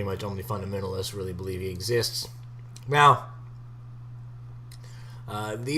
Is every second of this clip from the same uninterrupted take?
no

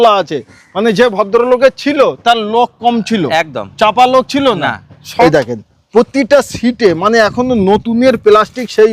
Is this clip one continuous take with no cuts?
no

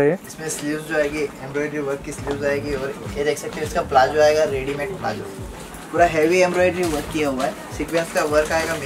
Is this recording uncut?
no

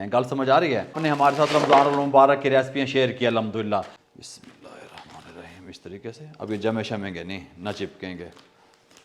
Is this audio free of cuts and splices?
no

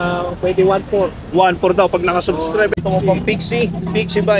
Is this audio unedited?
no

